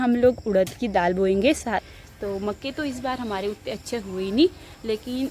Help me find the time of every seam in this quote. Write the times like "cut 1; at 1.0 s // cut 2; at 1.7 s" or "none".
cut 1; at 1.9 s